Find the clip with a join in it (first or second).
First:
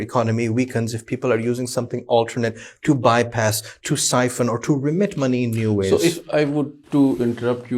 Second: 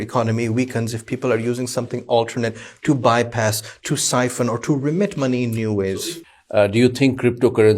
second